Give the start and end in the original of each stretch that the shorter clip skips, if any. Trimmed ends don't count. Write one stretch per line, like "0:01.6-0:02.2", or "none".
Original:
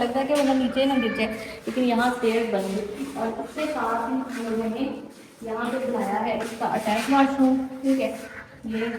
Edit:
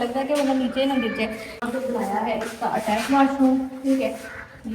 0:01.5-0:05.5